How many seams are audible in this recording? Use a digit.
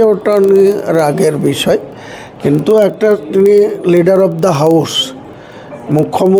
0